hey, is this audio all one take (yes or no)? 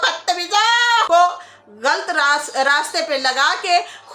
no